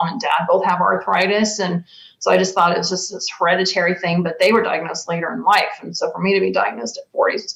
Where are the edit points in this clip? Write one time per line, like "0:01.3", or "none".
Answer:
none